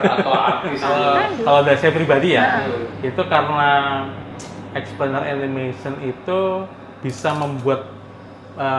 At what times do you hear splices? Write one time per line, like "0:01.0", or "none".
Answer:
0:00.9